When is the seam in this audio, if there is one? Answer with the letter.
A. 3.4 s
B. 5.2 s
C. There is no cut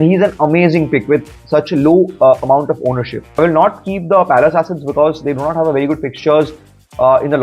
A